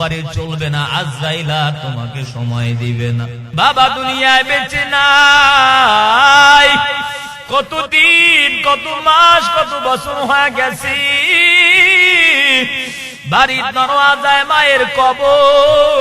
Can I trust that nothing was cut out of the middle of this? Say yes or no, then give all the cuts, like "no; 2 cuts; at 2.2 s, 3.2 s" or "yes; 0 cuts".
no; 1 cut; at 3.4 s